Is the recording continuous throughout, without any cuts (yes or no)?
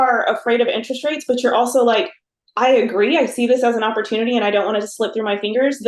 yes